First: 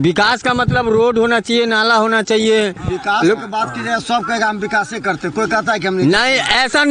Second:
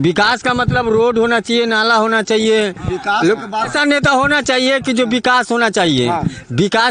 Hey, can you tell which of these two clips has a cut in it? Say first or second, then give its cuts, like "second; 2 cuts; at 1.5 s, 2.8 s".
second; 1 cut; at 3.7 s